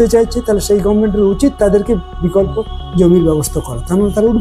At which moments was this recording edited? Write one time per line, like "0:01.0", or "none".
none